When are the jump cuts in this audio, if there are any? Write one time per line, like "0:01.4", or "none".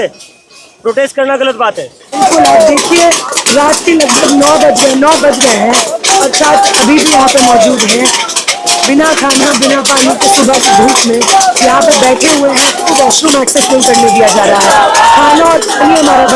0:02.2
0:12.9